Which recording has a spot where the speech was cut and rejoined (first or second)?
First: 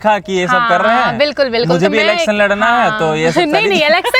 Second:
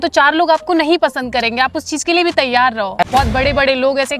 second